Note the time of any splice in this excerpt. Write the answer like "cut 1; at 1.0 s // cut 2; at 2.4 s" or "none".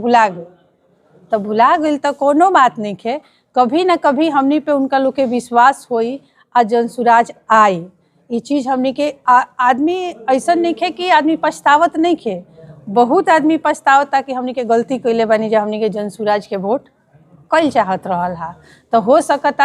none